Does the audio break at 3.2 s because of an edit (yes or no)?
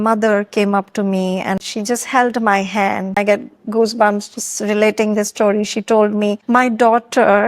yes